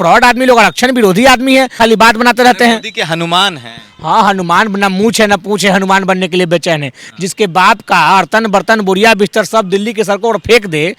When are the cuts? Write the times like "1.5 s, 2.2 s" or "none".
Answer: 1.8 s